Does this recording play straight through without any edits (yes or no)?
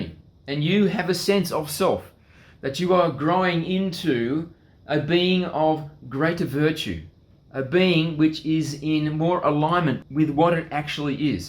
no